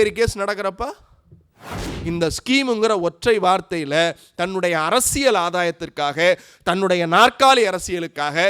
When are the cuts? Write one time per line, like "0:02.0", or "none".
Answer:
0:01.9